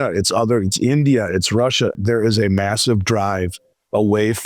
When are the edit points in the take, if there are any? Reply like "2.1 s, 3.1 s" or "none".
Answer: 2.0 s

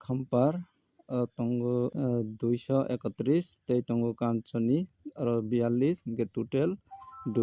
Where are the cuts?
1.9 s

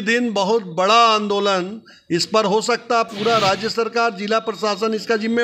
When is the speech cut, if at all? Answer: none

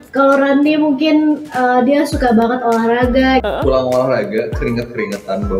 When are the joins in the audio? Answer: 3.4 s

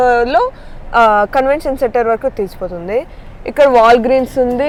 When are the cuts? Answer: none

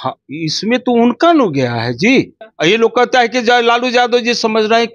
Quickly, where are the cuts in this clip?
2.4 s

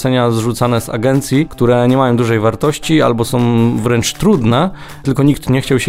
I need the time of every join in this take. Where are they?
1.5 s

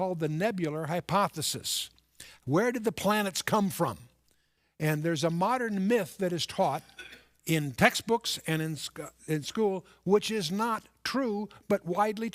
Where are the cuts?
2.2 s

